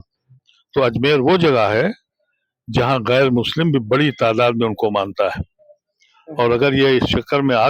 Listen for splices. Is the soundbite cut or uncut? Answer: uncut